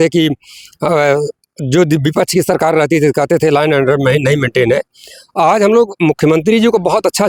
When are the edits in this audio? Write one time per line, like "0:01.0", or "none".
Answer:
none